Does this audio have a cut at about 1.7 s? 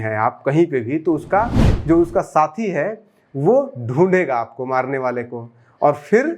yes; 1 cut; at 1.7 s

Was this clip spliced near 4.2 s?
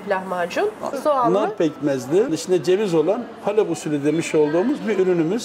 no; 2 cuts; at 1.0 s, 2.4 s

